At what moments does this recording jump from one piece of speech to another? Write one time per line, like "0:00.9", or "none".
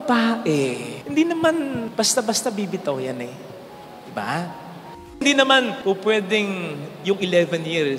0:05.2